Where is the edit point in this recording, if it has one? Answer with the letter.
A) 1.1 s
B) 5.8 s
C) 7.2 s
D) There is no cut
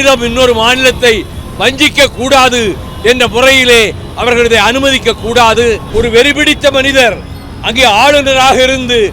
B